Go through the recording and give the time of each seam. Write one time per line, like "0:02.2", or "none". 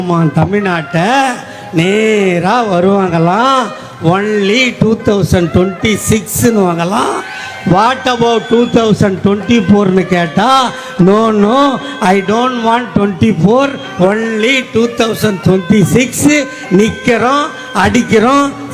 none